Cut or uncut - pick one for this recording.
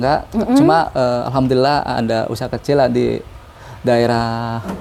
uncut